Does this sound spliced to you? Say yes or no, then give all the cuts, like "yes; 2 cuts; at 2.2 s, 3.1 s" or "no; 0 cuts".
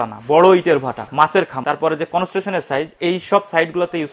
yes; 1 cut; at 1.1 s